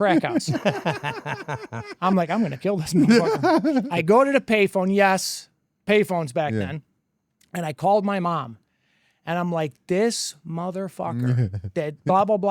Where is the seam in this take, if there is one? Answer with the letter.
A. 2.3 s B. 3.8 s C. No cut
B